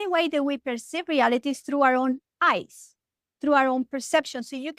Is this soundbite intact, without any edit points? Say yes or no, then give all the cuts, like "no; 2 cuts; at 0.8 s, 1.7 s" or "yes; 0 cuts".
yes; 0 cuts